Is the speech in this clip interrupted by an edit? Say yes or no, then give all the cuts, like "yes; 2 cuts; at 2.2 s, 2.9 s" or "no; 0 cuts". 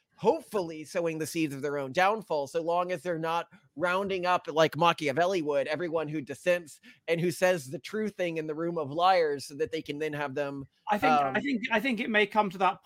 no; 0 cuts